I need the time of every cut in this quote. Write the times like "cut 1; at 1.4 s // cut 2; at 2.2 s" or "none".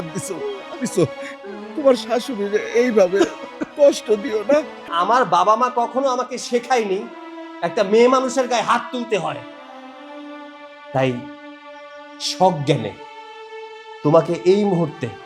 cut 1; at 4.9 s